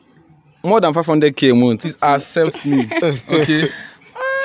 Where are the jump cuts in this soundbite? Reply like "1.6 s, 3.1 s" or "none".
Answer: 1.9 s